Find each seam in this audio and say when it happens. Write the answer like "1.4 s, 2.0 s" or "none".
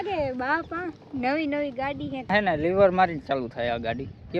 2.2 s